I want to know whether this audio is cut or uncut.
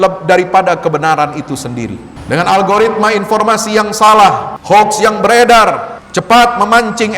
cut